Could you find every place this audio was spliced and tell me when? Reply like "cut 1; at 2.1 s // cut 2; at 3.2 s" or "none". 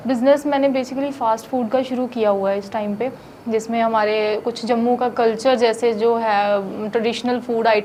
none